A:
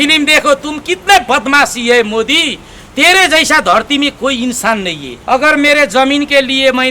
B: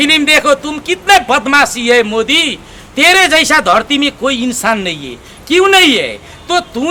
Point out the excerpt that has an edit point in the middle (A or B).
A